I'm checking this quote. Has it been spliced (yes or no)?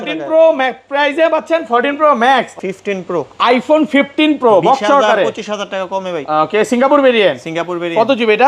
yes